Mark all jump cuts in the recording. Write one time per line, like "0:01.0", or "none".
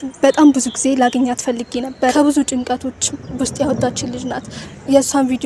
0:02.1